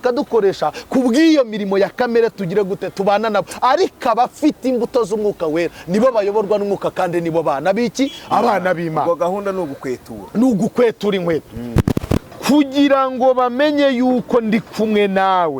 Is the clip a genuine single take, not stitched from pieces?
no; 1 cut; at 12.2 s

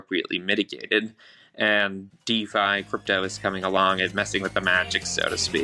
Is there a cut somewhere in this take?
no; 0 cuts

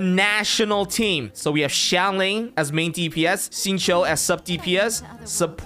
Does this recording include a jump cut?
no; 0 cuts

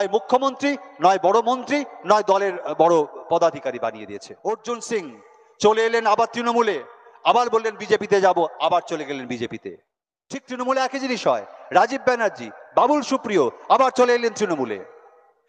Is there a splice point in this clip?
yes; 1 cut; at 4.2 s

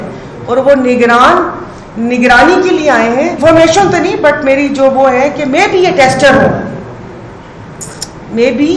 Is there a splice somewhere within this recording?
yes; 1 cut; at 3.4 s

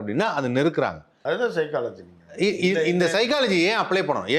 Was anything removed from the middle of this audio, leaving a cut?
yes; 1 cut; at 1.1 s

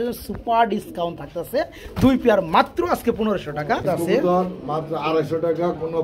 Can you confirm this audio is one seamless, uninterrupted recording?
no; 1 cut; at 3.8 s

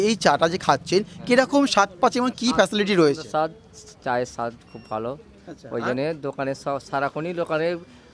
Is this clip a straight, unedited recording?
yes; 0 cuts

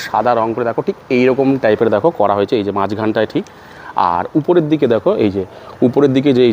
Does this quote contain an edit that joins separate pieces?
no; 0 cuts

